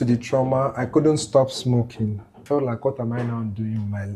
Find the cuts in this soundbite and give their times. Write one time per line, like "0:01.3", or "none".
0:02.4